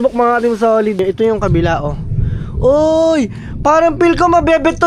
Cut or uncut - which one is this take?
cut